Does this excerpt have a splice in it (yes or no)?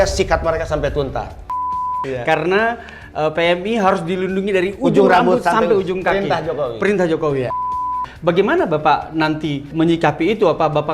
yes